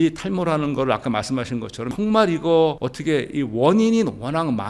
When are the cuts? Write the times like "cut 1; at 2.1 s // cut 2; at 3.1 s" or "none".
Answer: cut 1; at 1.9 s